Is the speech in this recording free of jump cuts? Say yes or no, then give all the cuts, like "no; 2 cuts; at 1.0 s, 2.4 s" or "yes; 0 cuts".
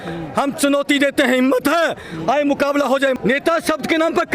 no; 1 cut; at 3.1 s